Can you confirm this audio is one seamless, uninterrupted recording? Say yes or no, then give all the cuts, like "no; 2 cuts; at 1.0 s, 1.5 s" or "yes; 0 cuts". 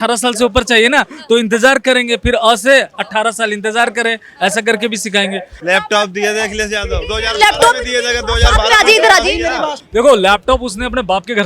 no; 2 cuts; at 5.5 s, 9.8 s